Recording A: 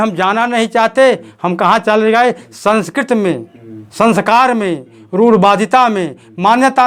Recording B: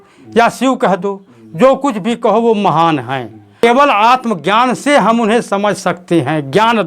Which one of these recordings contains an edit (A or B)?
B